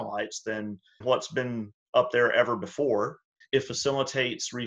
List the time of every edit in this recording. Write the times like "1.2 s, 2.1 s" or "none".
1.0 s, 3.3 s